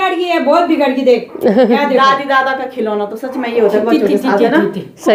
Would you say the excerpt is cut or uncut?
uncut